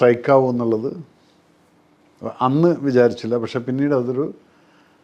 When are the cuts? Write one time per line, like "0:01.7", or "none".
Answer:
none

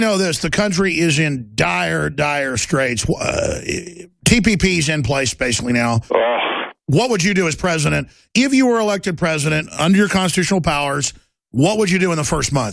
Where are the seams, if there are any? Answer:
0:08.2

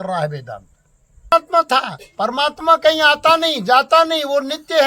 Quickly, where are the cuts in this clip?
0:01.3

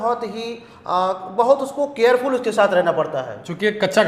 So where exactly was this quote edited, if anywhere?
none

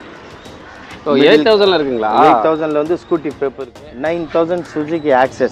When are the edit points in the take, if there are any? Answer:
0:03.7

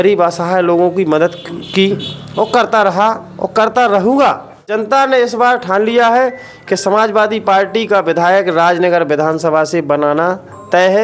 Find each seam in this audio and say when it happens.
0:04.7

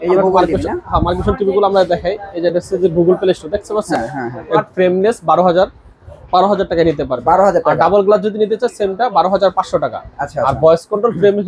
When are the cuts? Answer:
0:04.6

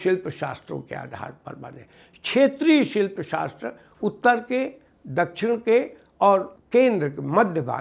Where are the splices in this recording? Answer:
0:06.6

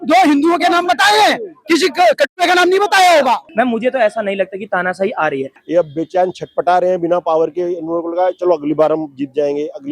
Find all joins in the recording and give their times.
0:03.5
0:05.4

